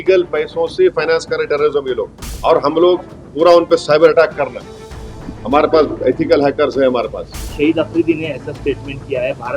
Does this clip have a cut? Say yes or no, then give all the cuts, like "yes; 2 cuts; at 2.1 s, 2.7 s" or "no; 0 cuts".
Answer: yes; 2 cuts; at 2.2 s, 7.4 s